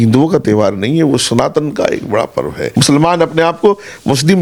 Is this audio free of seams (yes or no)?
no